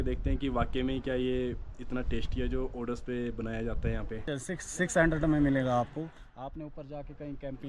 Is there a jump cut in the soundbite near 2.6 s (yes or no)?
no